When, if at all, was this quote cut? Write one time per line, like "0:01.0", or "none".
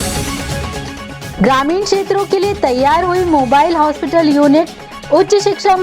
0:01.2